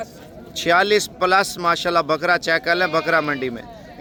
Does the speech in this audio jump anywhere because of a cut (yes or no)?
no